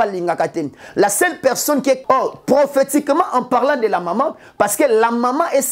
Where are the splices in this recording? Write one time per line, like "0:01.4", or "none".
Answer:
0:02.0